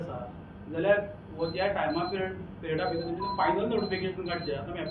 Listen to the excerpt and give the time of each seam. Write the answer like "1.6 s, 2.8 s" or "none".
none